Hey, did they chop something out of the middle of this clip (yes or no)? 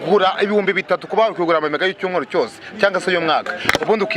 no